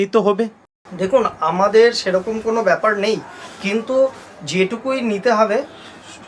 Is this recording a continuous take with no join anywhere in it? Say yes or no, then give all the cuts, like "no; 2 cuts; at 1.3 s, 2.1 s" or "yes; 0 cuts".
yes; 0 cuts